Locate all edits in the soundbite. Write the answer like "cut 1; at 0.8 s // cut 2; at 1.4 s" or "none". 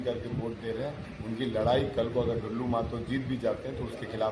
none

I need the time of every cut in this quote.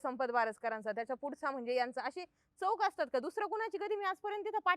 none

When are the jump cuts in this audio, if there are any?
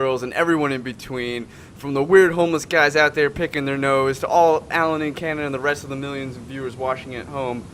none

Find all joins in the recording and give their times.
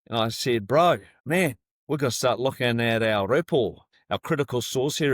cut 1; at 1.1 s // cut 2; at 3.9 s

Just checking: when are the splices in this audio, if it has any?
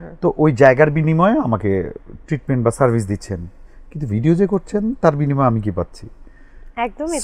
none

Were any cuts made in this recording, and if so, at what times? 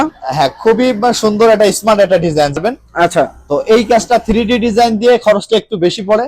cut 1; at 2.6 s

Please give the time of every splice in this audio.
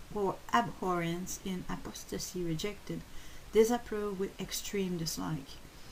cut 1; at 4.3 s

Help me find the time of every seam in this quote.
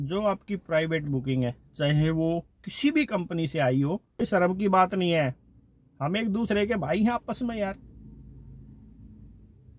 cut 1; at 4.2 s

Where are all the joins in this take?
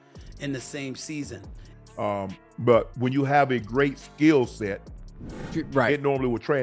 cut 1; at 1.8 s

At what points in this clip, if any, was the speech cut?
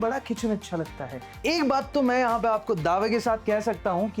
cut 1; at 1.4 s

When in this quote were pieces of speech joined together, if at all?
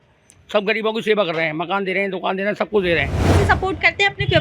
cut 1; at 3.3 s

